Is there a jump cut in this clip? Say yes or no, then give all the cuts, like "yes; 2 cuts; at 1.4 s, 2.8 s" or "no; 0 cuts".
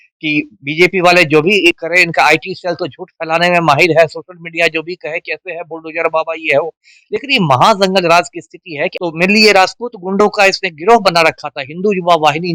yes; 1 cut; at 9.0 s